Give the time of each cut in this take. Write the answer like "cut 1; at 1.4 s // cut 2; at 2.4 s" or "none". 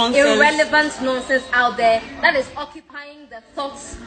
none